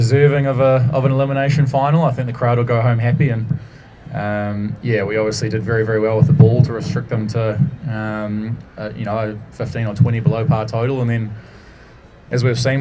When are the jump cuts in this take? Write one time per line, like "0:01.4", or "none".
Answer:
none